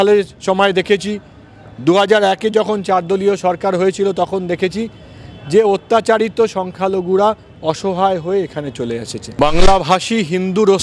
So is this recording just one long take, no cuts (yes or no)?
no